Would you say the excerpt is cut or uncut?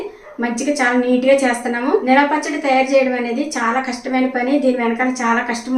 cut